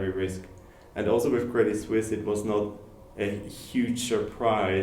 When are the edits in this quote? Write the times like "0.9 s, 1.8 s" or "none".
none